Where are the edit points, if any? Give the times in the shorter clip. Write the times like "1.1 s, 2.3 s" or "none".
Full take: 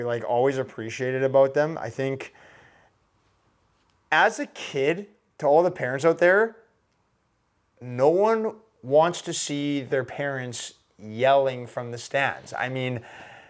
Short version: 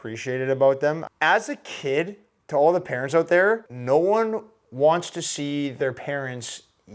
1.1 s, 3.7 s